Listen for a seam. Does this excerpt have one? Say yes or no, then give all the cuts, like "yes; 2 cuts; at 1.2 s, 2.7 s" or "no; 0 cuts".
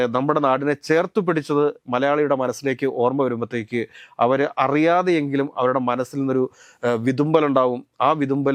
no; 0 cuts